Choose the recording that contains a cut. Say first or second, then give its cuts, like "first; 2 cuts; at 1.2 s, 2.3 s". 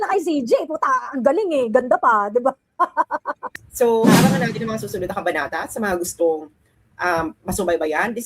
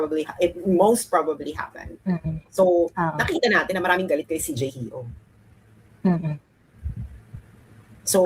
first; 1 cut; at 3.4 s